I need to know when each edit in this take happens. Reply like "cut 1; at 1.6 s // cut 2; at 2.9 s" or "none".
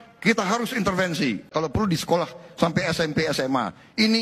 cut 1; at 1.5 s